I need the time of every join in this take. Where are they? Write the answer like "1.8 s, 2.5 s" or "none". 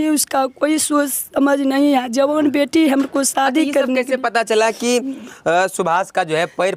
none